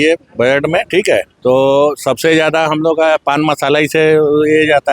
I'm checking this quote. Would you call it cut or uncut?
cut